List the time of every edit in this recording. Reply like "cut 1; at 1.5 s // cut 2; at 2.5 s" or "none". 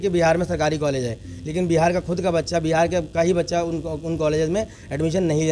none